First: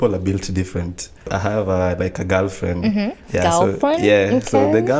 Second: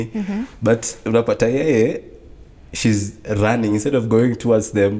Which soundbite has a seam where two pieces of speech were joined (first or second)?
first